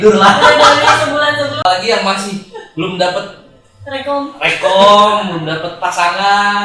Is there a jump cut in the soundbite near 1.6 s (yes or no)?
yes